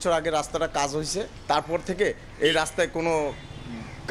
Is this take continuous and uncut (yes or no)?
yes